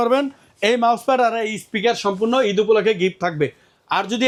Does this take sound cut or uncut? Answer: uncut